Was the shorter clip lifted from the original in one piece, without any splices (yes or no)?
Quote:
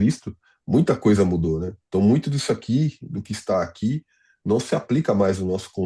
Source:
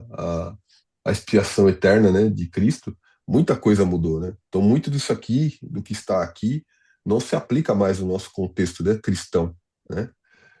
yes